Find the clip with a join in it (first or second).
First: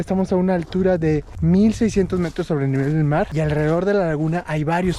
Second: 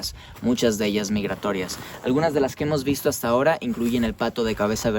first